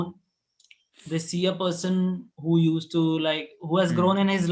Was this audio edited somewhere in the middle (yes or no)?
no